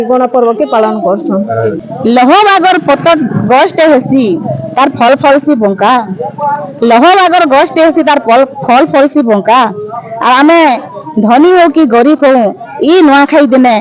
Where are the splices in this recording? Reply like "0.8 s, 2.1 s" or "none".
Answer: 1.9 s